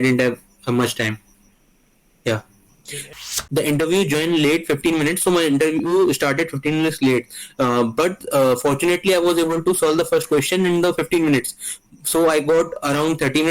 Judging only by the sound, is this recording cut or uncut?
cut